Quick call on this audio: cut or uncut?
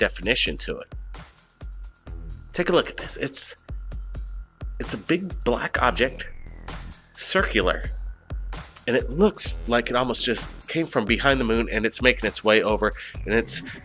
uncut